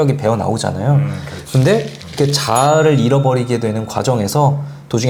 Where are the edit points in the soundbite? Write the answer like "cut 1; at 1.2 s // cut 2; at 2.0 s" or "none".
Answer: none